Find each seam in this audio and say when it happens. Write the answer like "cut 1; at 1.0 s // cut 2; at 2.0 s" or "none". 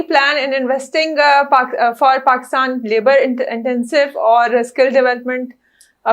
none